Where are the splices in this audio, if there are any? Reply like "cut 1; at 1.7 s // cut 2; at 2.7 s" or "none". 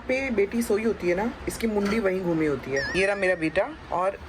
cut 1; at 2.9 s